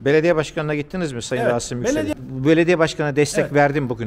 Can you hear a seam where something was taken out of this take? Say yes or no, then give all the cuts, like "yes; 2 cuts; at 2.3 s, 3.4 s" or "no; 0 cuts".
yes; 1 cut; at 2.1 s